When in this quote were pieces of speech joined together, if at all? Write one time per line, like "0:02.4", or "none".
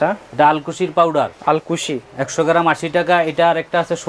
0:01.3